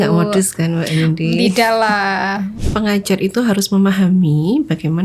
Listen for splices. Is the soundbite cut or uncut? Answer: cut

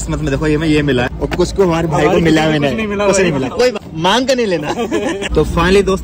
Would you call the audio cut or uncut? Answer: cut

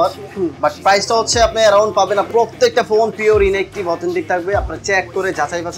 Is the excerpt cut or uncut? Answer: cut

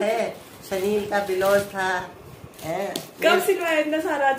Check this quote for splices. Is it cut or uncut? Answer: uncut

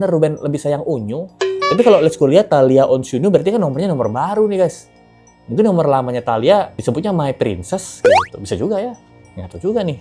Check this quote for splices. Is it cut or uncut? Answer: uncut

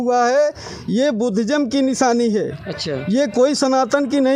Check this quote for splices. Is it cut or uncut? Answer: uncut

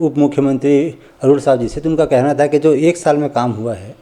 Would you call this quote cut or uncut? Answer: uncut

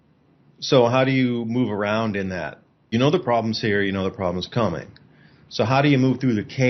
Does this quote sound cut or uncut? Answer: cut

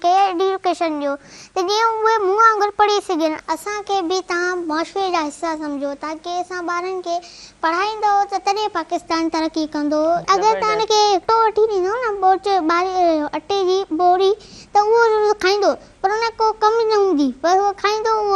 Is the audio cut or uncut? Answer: cut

